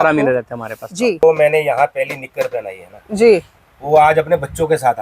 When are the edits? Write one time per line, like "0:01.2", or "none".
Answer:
0:01.2